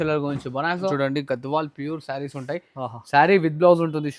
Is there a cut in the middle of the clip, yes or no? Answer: yes